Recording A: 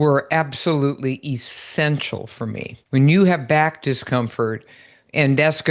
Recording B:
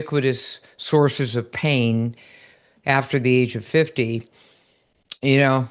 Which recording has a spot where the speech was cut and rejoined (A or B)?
A